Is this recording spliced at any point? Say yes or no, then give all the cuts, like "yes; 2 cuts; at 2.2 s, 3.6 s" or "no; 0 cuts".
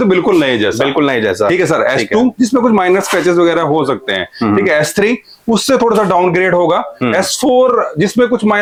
no; 0 cuts